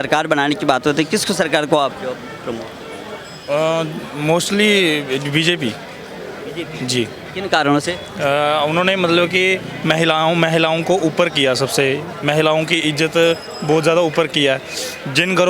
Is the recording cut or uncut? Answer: uncut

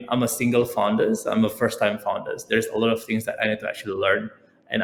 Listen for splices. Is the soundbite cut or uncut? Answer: uncut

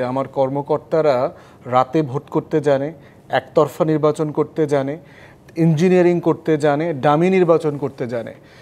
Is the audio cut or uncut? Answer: uncut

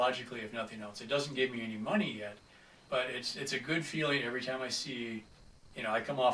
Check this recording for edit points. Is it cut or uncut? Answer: uncut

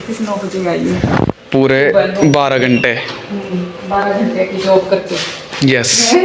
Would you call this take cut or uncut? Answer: uncut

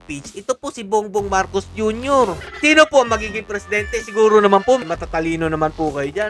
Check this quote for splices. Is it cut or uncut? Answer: cut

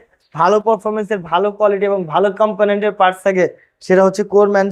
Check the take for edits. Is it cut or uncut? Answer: uncut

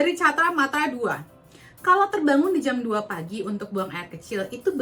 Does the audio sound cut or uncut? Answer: uncut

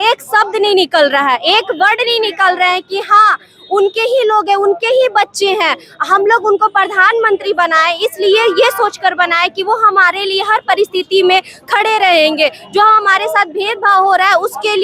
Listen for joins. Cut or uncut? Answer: uncut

